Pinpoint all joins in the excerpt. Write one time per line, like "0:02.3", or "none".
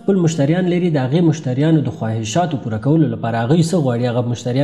none